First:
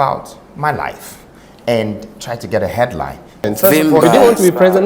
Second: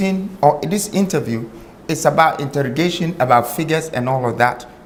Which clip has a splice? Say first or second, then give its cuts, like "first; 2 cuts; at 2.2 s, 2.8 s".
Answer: first; 1 cut; at 3.5 s